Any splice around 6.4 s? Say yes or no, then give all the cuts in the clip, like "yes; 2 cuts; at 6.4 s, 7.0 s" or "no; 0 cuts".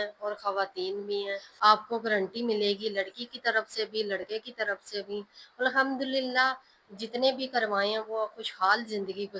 no; 1 cut; at 1.5 s